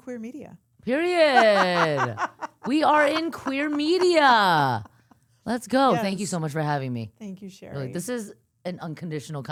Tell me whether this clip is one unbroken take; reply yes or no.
yes